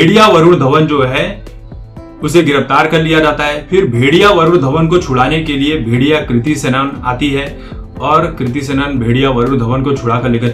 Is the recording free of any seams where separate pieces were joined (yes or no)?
yes